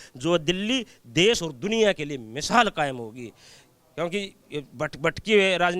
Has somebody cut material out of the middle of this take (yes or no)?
no